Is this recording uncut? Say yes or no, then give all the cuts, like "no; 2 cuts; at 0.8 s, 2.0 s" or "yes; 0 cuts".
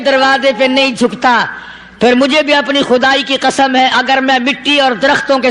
yes; 0 cuts